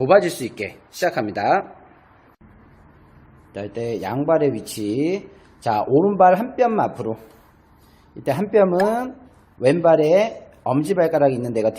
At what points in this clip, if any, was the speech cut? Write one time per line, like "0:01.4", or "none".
0:02.4